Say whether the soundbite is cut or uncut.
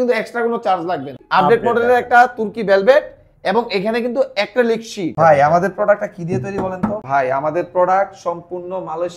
cut